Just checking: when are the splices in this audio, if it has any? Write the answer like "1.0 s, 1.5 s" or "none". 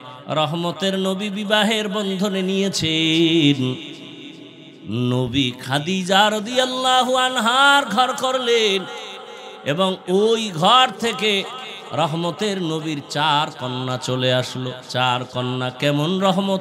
14.8 s